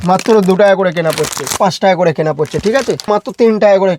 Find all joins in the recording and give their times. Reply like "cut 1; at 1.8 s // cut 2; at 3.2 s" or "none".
cut 1; at 1.6 s // cut 2; at 3.1 s

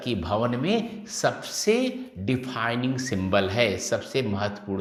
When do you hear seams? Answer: none

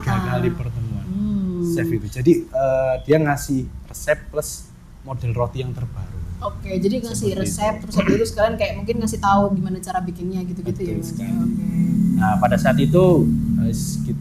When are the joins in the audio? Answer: none

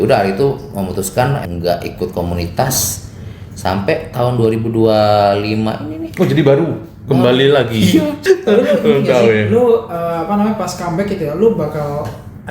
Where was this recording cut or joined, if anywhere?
cut 1; at 1.4 s // cut 2; at 8.1 s

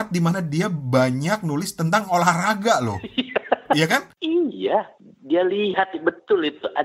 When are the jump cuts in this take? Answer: cut 1; at 4.2 s

